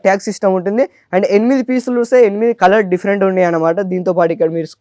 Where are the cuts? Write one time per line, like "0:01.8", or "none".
none